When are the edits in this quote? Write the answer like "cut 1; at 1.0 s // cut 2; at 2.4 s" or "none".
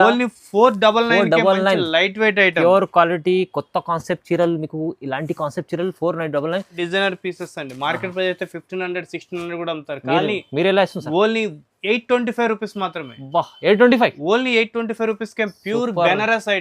cut 1; at 6.8 s